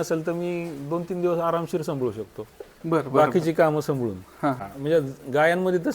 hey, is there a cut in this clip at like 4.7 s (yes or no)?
yes